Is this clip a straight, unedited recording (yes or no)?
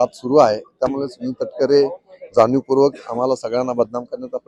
yes